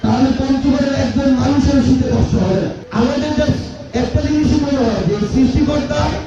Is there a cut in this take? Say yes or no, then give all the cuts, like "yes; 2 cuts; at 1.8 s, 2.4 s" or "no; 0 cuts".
yes; 1 cut; at 2.8 s